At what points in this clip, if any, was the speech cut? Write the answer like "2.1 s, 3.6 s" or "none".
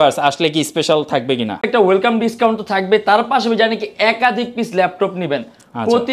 1.6 s